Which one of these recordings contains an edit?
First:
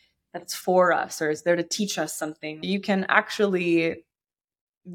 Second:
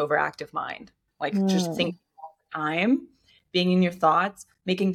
first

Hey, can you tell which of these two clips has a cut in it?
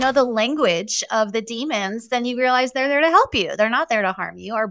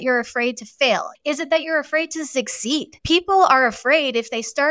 second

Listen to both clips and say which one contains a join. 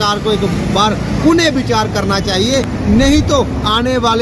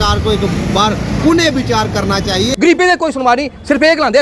second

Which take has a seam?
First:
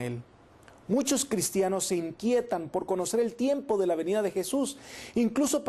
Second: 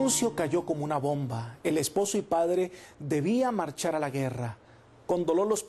second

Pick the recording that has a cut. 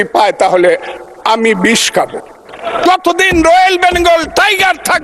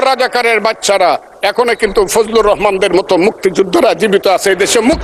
first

